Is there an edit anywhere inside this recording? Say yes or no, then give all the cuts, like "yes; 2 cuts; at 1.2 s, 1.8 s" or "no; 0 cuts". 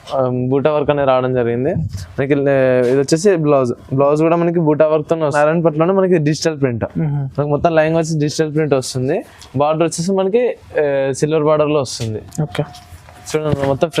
yes; 1 cut; at 5.3 s